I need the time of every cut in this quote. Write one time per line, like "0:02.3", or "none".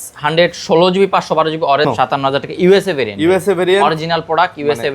0:01.9

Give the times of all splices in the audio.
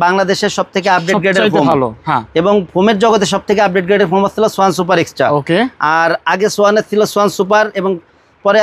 none

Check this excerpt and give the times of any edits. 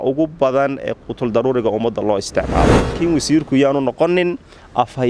0:03.0

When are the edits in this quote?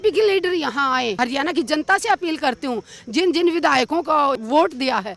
0:01.2
0:04.4

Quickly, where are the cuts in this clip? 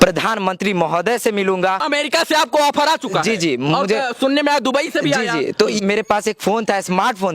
0:01.8
0:05.8

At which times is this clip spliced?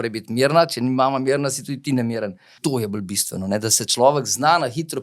0:02.5

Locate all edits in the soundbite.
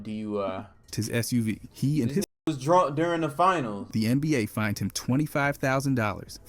0:03.8

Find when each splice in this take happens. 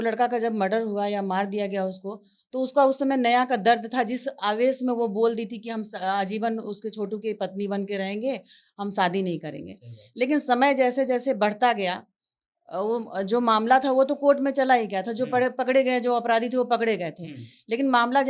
none

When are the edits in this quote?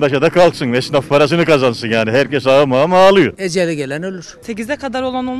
0:04.0

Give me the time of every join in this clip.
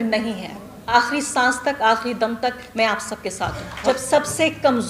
0:00.9
0:03.7

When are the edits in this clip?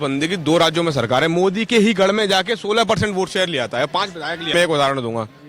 0:04.5

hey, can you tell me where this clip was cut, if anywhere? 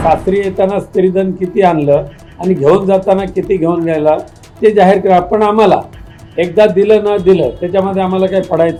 none

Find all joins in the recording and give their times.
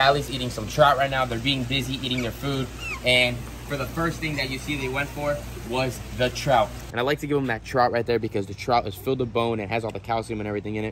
0:06.8

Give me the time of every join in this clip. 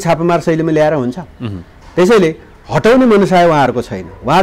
none

